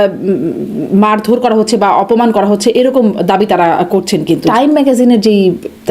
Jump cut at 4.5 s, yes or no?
yes